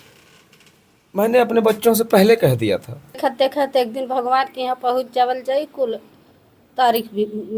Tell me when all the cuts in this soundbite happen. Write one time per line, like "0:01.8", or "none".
0:03.2